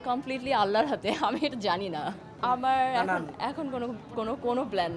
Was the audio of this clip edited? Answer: no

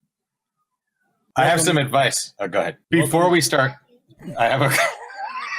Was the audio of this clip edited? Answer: yes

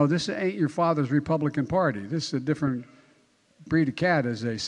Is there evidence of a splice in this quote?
no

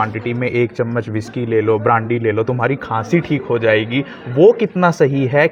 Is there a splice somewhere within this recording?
no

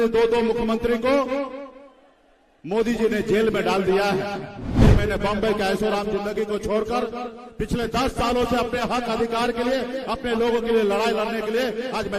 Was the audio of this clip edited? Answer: yes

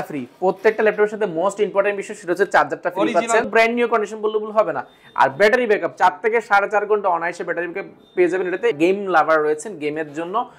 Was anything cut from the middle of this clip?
yes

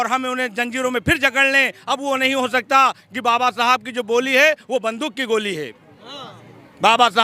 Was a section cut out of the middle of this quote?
no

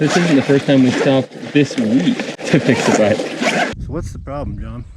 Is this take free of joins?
no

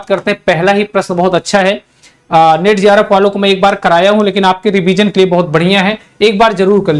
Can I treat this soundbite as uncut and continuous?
yes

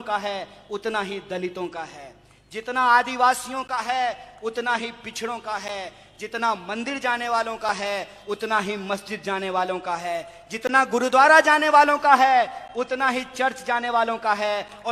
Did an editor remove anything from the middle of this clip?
no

